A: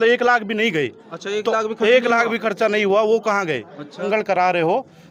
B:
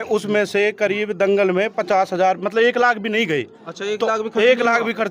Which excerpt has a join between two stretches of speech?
A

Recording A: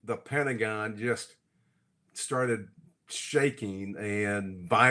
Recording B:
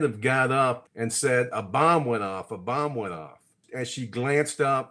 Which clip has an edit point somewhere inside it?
B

